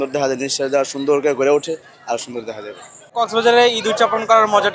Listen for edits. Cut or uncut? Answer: cut